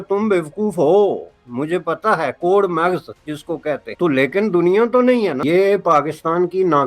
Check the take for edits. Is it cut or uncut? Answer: cut